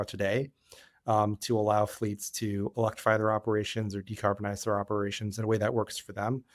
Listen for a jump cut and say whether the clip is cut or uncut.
uncut